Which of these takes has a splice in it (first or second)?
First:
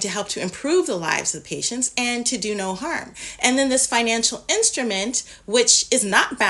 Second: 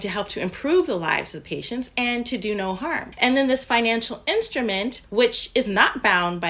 second